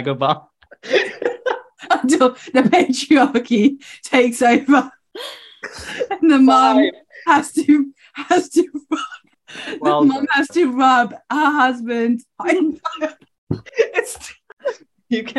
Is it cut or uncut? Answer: uncut